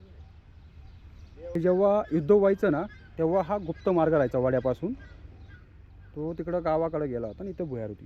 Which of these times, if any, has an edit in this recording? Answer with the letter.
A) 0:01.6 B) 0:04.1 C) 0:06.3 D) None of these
A